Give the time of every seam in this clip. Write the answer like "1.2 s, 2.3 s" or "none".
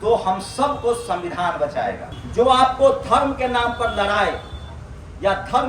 2.1 s

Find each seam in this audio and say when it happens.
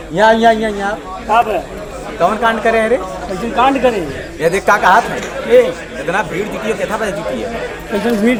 none

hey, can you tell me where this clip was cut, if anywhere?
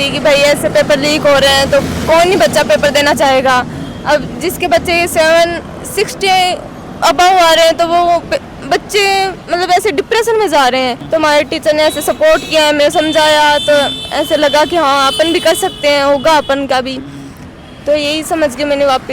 none

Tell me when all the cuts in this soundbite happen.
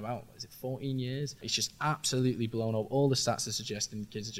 1.5 s

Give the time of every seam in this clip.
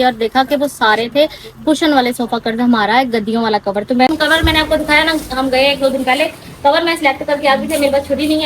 4.1 s

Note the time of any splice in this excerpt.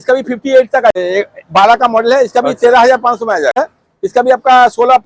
0.9 s, 3.6 s

